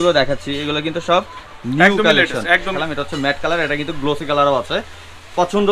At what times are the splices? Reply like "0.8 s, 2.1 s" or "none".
2.8 s